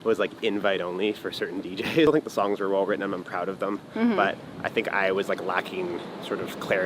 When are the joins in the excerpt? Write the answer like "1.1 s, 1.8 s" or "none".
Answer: 2.1 s

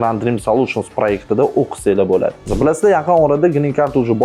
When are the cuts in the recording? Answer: 2.4 s

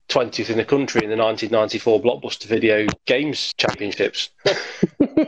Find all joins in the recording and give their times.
3.2 s, 4.3 s

